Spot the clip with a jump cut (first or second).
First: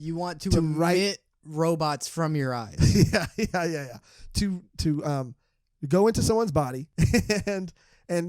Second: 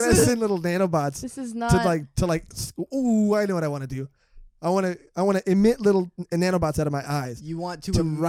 first